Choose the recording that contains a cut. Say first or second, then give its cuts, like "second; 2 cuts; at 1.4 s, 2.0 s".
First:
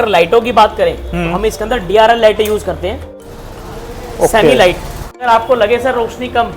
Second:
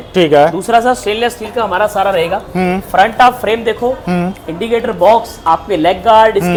first; 2 cuts; at 3.1 s, 5.1 s